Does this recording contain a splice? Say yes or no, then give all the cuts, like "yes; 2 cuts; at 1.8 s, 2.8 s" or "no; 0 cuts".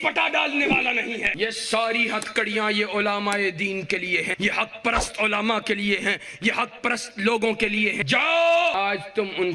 yes; 4 cuts; at 1.3 s, 4.3 s, 8.0 s, 8.7 s